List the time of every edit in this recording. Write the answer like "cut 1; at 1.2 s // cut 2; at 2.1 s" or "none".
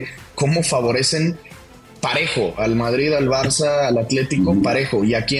none